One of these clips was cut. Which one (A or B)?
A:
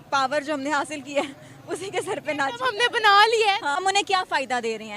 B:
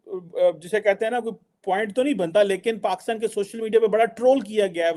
A